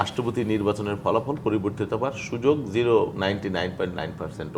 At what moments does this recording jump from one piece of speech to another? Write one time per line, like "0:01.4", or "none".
none